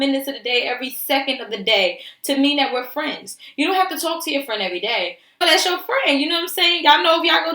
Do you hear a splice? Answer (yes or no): yes